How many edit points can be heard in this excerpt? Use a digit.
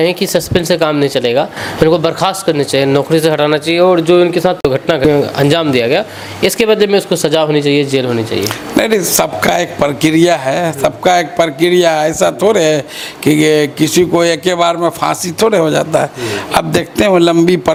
0